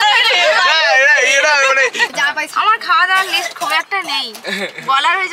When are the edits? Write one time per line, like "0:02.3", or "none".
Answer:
0:02.1